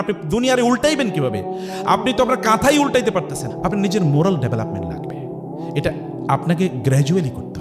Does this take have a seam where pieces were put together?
yes; 1 cut; at 3.4 s

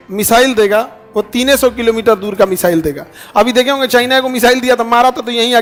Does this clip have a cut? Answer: no; 0 cuts

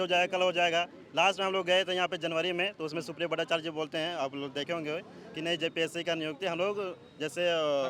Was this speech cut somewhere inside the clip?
no; 0 cuts

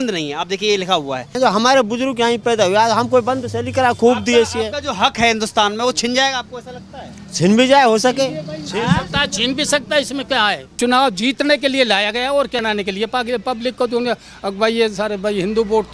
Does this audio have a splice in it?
yes; 2 cuts; at 1.3 s, 10.7 s

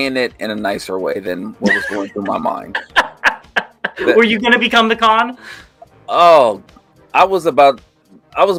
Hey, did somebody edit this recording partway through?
no; 0 cuts

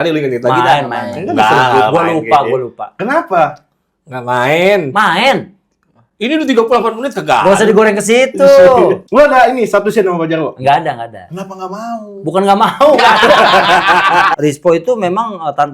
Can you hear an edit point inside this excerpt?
yes; 2 cuts; at 9.0 s, 14.3 s

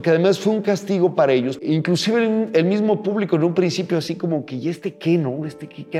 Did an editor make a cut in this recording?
yes; 1 cut; at 1.6 s

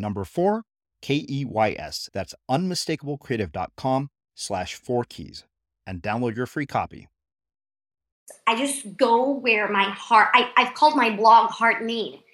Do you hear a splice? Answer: yes; 1 cut; at 8.3 s

